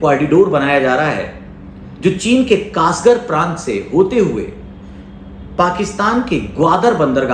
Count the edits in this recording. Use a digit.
0